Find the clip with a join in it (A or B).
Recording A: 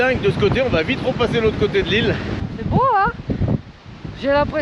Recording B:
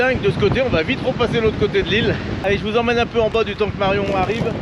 A